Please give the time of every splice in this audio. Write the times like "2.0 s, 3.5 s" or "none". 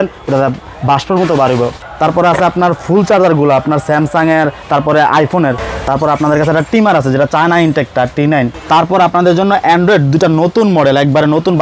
1.8 s, 5.7 s, 8.6 s